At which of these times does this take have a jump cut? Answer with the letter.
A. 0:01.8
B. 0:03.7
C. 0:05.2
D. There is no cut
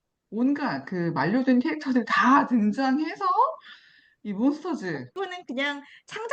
C